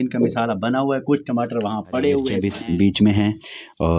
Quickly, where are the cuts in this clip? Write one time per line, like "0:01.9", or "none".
0:02.4